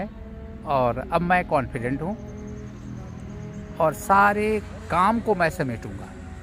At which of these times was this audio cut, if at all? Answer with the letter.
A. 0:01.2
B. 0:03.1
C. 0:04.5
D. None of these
D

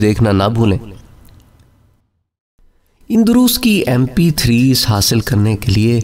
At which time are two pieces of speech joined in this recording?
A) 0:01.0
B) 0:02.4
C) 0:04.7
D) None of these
B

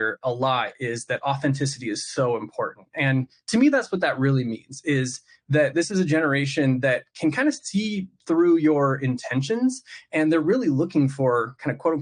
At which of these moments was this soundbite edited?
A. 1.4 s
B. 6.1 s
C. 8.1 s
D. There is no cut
D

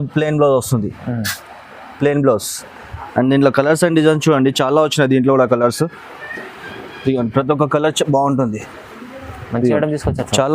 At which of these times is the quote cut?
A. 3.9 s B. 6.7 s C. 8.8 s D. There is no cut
D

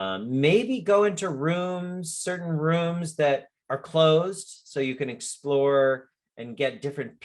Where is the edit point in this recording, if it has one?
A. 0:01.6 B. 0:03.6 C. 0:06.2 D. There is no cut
B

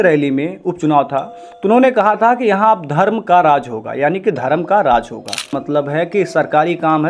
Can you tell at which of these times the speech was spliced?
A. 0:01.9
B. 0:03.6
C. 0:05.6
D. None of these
C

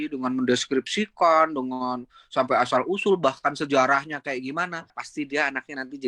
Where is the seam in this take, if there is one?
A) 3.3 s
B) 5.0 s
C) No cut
B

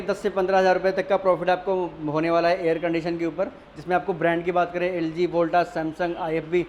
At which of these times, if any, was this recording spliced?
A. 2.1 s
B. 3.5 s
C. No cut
C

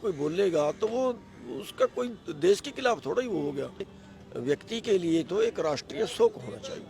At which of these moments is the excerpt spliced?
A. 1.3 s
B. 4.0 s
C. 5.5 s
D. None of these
B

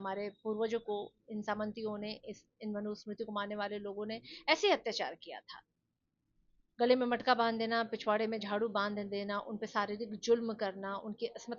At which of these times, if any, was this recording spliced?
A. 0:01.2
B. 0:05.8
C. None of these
C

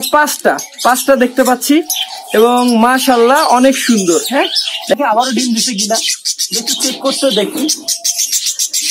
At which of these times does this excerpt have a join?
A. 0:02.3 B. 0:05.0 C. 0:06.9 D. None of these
B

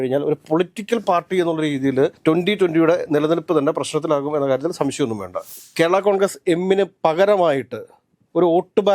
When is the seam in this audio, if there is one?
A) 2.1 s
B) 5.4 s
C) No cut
B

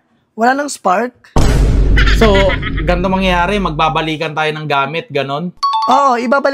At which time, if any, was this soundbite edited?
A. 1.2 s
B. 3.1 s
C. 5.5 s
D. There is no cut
D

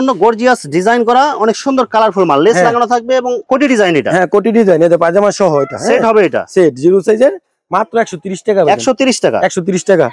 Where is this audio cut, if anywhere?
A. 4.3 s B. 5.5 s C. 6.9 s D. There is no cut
D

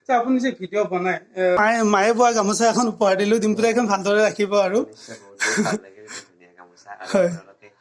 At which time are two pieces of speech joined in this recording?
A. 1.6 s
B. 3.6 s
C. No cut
A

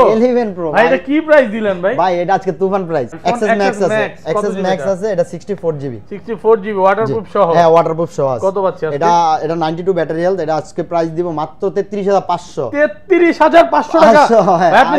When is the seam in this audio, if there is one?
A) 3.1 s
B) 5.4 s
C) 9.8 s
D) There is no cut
A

